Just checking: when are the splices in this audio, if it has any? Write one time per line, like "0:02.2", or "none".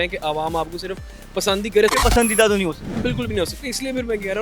0:01.9
0:02.9